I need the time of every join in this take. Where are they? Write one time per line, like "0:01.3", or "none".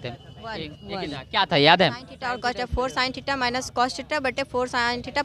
none